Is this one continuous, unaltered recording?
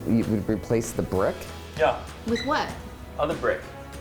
yes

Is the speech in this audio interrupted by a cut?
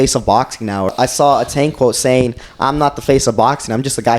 yes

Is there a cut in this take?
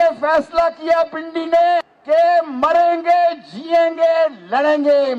yes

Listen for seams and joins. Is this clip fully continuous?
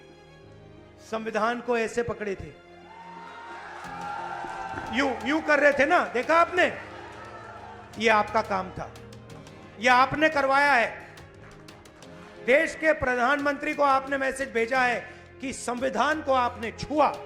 yes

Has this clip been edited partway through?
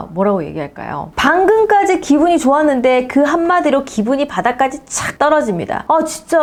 no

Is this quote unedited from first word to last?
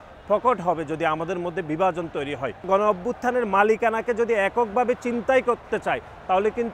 no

